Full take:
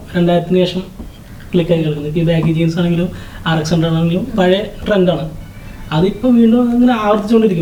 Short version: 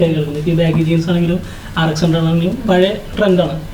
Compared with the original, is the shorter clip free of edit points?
yes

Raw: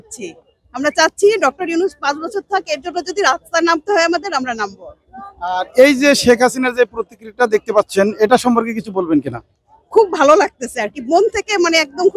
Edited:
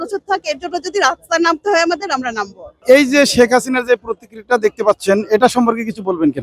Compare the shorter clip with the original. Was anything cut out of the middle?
yes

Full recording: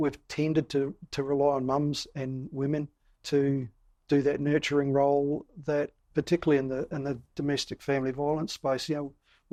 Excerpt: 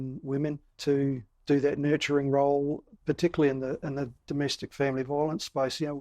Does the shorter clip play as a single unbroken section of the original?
no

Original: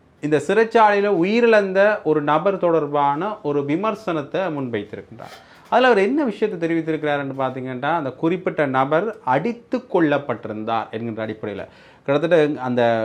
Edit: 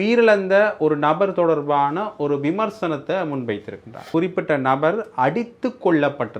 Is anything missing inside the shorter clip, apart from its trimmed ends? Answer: yes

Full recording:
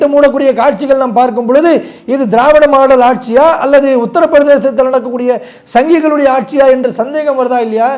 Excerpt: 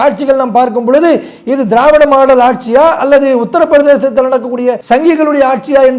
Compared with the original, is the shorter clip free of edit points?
no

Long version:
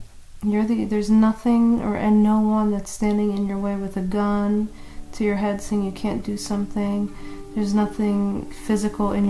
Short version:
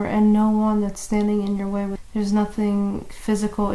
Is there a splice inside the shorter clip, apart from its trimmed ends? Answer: yes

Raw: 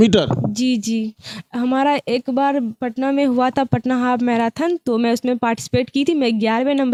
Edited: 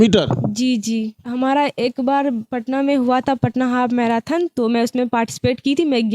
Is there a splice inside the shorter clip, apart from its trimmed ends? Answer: yes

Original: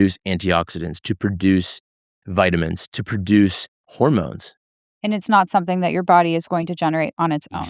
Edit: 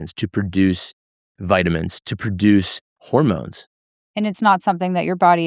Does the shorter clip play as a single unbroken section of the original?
yes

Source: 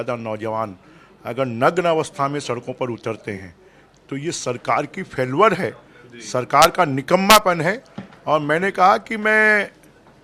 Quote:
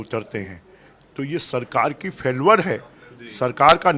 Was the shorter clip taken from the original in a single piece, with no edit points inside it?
yes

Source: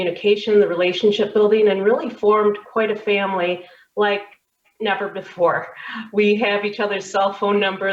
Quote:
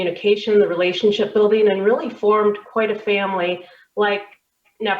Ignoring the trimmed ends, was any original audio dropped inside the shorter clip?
no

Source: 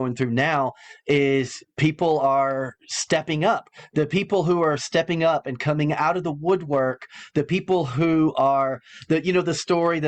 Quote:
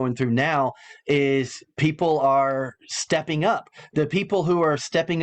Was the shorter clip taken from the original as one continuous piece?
yes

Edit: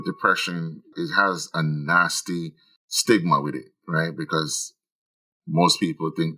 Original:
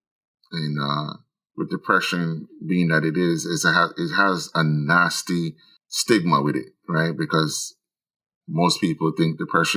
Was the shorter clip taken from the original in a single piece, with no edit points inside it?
no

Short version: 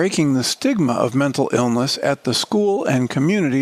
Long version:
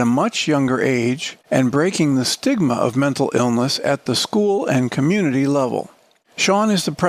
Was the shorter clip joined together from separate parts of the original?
no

